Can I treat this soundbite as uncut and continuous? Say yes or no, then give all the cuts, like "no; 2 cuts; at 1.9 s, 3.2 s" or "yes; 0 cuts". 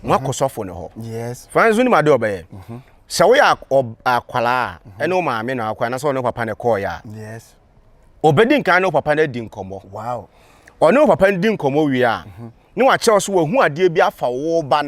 yes; 0 cuts